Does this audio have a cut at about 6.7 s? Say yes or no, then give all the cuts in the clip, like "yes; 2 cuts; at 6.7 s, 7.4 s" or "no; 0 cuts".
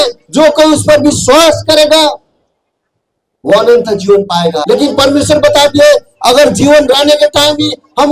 no; 1 cut; at 4.6 s